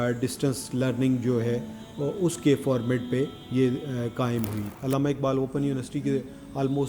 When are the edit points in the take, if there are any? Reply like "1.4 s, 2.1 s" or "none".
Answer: 4.6 s